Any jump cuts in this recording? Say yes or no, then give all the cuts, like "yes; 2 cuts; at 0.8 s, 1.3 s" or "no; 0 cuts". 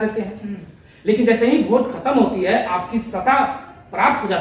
no; 0 cuts